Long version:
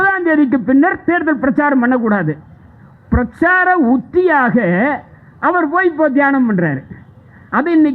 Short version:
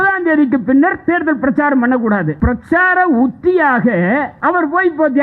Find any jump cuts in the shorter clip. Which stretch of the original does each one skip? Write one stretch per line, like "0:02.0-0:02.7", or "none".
0:02.3-0:03.0
0:05.0-0:05.3